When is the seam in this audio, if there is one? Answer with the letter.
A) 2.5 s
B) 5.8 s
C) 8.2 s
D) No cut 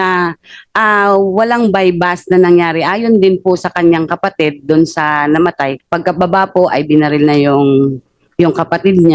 B